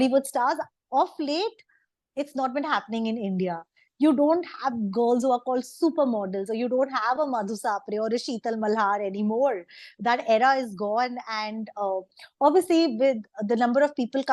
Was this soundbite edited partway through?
no; 0 cuts

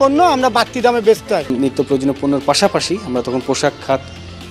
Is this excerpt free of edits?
no; 1 cut; at 1.5 s

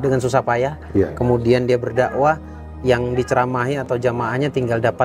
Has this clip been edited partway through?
no; 0 cuts

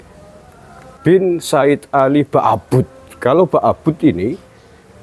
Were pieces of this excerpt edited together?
yes; 1 cut; at 0.9 s

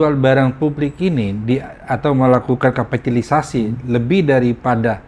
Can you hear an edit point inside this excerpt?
no; 0 cuts

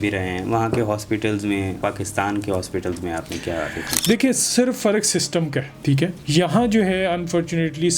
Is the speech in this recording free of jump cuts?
no; 2 cuts; at 1.8 s, 6.2 s

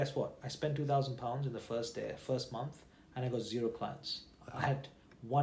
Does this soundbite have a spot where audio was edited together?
no; 0 cuts

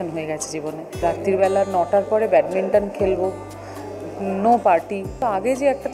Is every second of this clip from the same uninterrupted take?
no; 2 cuts; at 1.0 s, 5.2 s

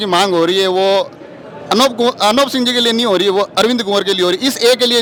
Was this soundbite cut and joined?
no; 0 cuts

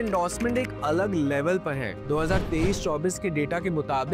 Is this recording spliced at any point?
no; 0 cuts

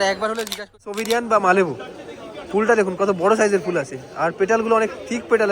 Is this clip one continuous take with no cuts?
no; 1 cut; at 1.0 s

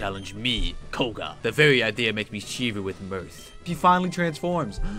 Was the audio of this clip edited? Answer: yes; 2 cuts; at 1.3 s, 3.6 s

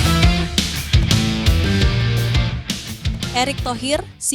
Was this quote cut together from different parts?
no; 0 cuts

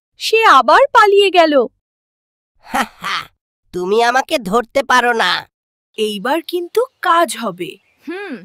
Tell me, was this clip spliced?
no; 0 cuts

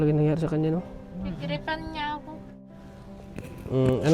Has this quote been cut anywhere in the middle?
yes; 1 cut; at 2.7 s

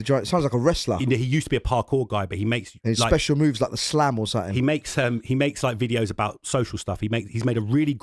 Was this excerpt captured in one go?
yes; 0 cuts

